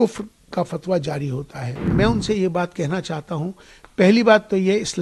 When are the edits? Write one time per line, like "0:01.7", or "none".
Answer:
0:01.8

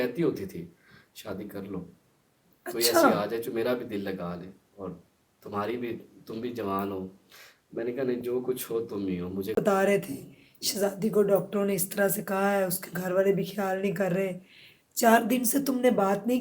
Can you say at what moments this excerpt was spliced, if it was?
0:09.5

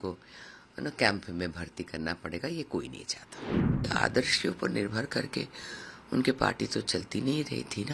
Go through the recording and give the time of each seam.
0:03.8

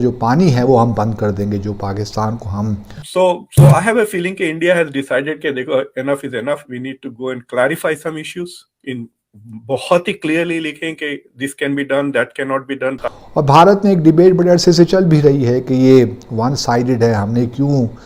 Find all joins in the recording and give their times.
0:03.0
0:13.0

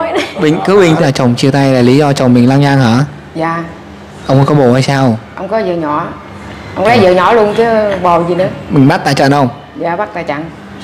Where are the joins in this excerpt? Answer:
0:01.0

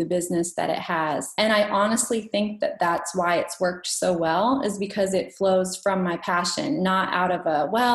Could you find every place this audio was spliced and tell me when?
0:01.3

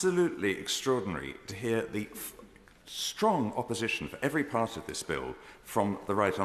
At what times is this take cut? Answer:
none

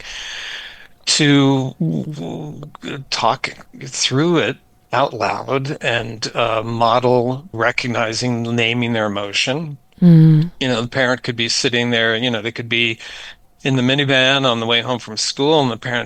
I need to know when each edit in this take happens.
none

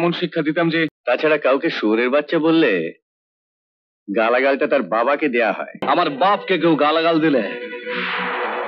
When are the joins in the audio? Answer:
0:01.0
0:05.8

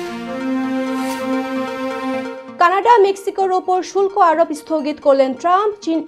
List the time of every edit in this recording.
none

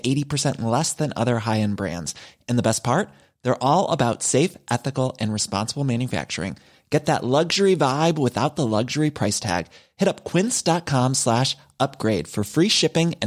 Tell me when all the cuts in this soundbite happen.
none

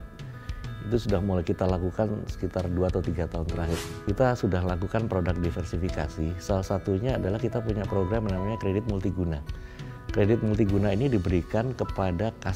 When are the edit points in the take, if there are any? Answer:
0:03.9

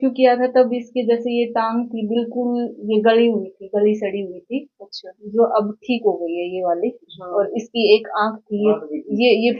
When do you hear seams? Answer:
none

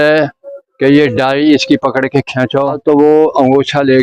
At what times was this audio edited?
0:02.8

